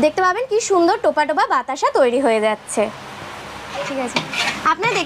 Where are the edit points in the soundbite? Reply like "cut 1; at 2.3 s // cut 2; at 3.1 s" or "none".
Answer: none